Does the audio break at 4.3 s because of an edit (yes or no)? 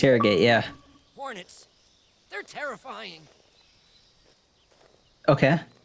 yes